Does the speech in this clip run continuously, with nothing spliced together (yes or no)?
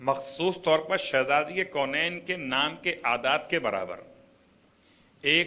yes